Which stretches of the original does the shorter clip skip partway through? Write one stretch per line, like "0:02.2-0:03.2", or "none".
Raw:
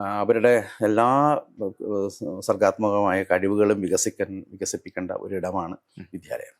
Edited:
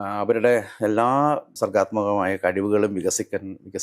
0:01.5-0:02.4

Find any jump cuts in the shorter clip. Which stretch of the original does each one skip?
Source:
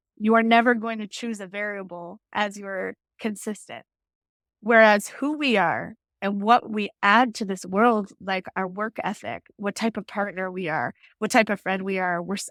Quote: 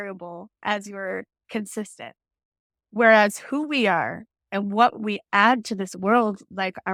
none

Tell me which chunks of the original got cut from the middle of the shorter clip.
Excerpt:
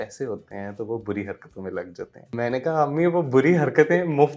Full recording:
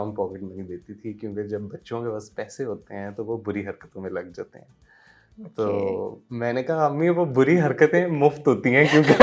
0:04.6-0:06.2

